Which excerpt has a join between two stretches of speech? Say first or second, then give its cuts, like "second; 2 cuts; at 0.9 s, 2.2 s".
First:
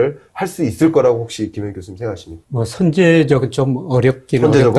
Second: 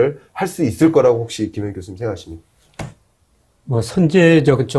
first; 1 cut; at 2.3 s